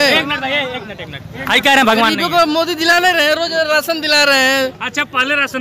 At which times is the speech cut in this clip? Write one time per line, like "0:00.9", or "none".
none